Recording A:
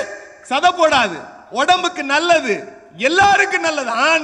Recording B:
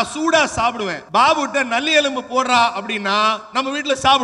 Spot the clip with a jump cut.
B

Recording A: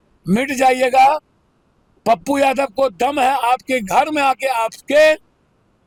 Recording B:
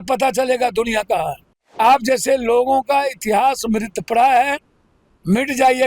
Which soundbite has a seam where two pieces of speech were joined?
B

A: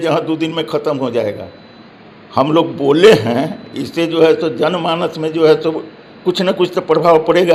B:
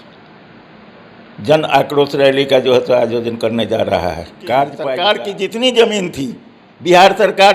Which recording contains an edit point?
B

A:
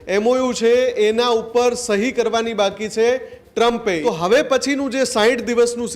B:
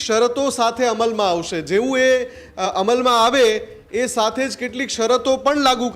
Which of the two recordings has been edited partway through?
A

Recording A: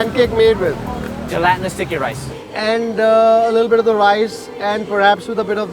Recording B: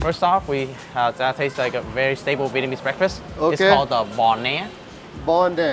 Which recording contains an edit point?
A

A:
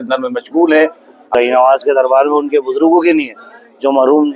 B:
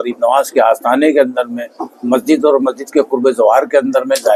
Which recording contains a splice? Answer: A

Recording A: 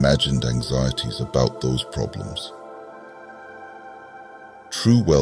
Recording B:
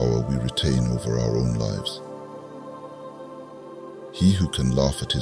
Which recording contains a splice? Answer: B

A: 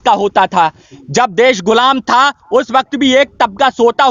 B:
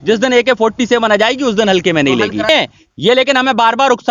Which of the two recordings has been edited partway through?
B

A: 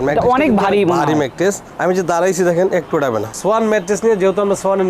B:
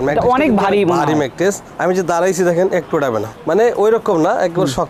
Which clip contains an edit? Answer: A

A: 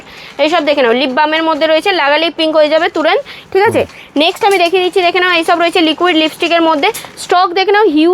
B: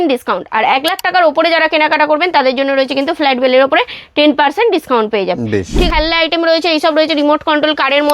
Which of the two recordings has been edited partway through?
B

